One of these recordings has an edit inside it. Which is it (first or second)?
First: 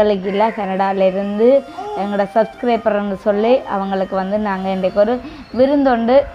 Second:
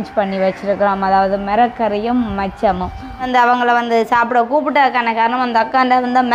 second